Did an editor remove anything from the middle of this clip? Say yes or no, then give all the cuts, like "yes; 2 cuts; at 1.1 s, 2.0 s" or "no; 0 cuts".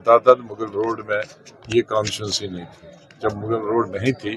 no; 0 cuts